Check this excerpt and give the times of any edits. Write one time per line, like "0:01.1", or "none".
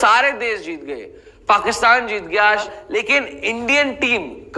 0:02.7